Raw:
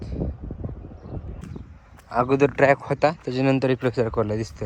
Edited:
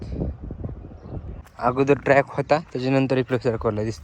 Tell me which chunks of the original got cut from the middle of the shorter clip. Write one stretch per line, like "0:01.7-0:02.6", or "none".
0:01.4-0:01.9